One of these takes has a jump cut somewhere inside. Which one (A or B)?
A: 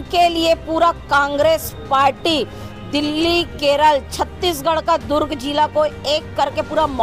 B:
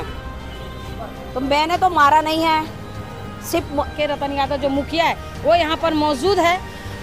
B